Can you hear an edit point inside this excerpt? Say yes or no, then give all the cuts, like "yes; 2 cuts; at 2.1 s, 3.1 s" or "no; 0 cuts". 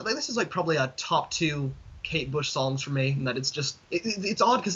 yes; 1 cut; at 3.8 s